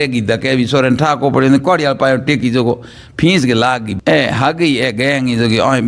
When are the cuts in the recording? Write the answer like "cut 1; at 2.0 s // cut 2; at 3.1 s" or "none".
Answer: cut 1; at 3.9 s